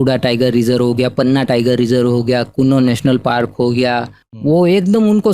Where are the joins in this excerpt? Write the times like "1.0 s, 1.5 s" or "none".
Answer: 4.2 s

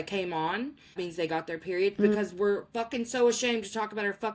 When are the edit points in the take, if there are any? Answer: 0.9 s

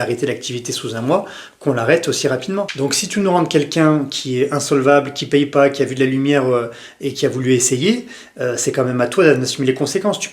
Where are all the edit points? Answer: 2.7 s

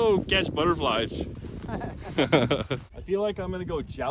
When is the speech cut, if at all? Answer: 2.9 s

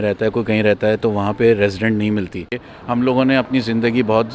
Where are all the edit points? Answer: 2.7 s

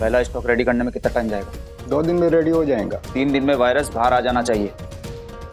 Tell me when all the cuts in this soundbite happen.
3.0 s

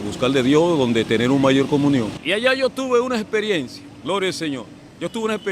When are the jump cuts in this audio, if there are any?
2.2 s

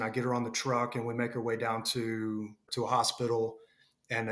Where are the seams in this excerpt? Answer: 2.6 s

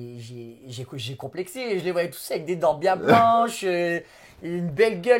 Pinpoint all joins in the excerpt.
none

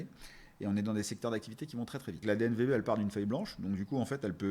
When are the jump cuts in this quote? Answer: 2.2 s

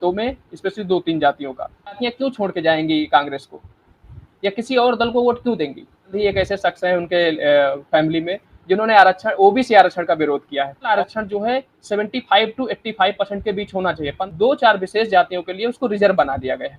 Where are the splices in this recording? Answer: 2.1 s, 6.1 s, 11.0 s, 14.2 s

